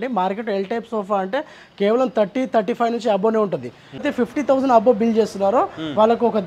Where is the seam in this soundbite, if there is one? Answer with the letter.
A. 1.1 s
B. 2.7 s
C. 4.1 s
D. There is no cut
C